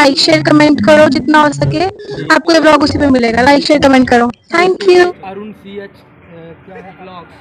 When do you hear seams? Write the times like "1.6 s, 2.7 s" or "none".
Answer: 5.1 s

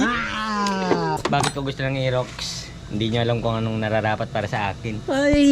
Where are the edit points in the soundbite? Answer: 1.2 s

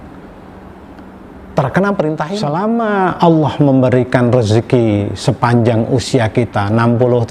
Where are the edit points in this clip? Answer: 2.4 s

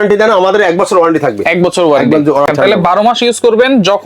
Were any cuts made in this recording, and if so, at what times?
2.5 s

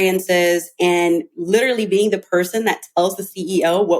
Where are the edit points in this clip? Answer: none

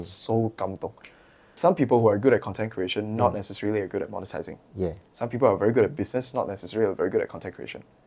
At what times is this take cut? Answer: 1.5 s

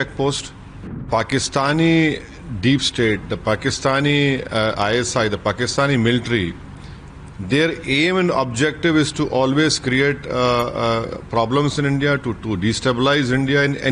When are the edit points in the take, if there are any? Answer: 1.1 s

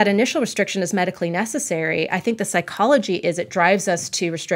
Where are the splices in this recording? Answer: none

